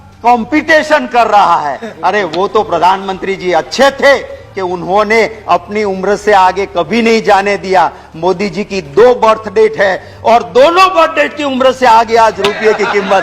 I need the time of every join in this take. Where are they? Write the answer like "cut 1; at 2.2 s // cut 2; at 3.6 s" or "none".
none